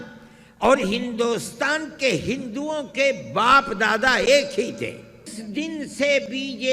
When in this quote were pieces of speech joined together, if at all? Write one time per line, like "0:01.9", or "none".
0:05.4